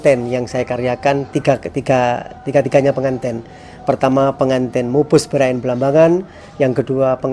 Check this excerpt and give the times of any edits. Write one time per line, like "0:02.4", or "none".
none